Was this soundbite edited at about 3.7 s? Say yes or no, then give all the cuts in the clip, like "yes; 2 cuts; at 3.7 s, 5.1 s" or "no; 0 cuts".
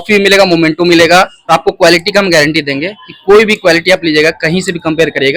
no; 1 cut; at 1.5 s